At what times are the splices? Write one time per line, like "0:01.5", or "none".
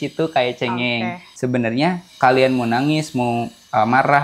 0:01.2